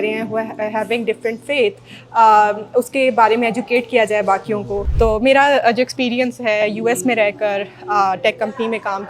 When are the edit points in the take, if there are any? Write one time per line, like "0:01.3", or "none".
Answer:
0:04.9